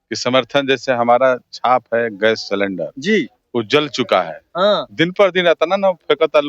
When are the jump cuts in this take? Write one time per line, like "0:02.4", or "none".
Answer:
none

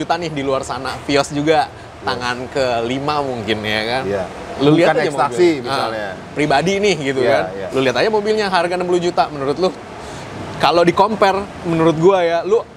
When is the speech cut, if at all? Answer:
none

